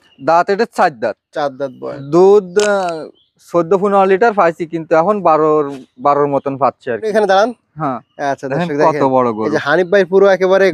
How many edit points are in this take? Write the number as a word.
two